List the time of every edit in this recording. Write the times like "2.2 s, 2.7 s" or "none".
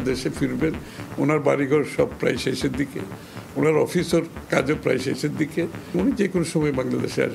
5.9 s